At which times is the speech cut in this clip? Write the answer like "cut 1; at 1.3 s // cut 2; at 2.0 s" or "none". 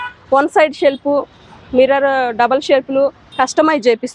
cut 1; at 3.2 s